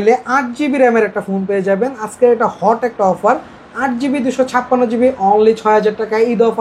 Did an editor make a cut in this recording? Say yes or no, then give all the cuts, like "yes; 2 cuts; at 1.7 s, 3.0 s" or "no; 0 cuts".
no; 0 cuts